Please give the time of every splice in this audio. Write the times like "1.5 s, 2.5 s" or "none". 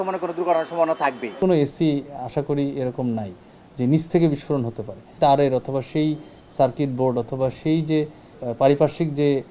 1.4 s, 5.1 s, 8.3 s